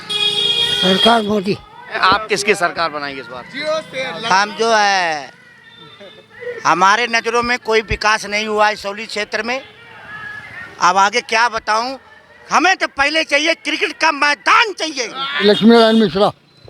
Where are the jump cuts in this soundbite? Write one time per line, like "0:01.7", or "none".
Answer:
0:02.0
0:15.2

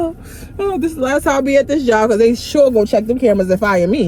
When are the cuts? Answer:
none

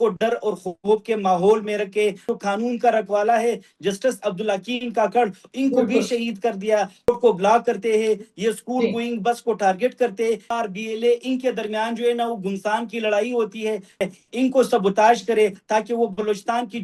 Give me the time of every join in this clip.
0:02.2
0:07.1
0:10.5
0:14.1

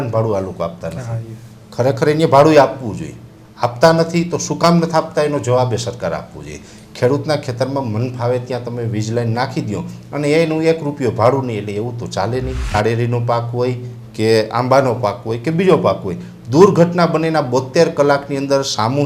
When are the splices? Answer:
0:12.7

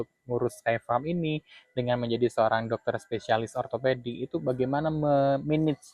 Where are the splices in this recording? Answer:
none

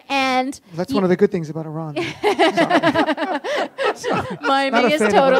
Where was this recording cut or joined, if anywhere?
none

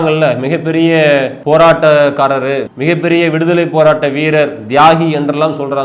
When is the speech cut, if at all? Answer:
0:01.3
0:02.7

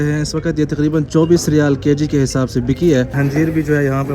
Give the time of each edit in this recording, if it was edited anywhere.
0:03.2

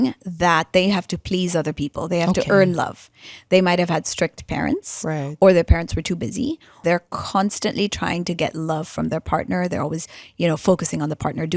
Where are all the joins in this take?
0:06.7

